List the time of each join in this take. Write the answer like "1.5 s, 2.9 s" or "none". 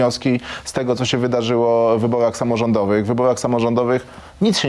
none